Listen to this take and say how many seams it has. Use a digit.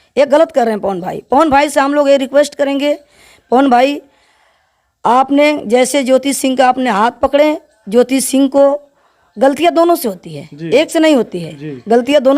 0